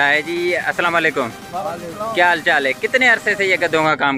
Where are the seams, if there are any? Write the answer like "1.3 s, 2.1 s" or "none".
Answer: none